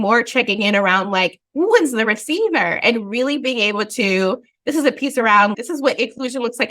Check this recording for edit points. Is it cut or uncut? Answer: cut